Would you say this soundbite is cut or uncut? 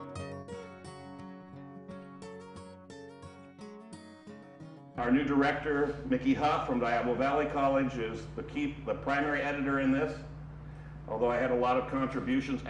uncut